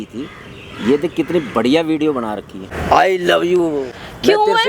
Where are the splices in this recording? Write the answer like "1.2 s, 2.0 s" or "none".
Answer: 2.8 s